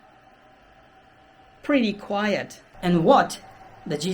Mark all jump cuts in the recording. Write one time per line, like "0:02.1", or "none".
0:02.8

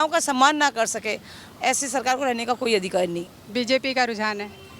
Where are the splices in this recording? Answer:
0:03.4

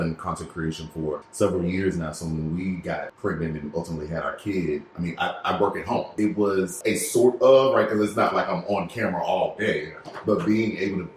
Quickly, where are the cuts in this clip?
0:01.3
0:03.1
0:06.3

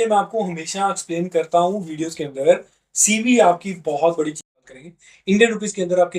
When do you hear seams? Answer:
0:04.5

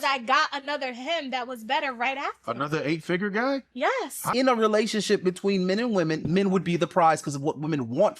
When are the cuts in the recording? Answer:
0:04.3

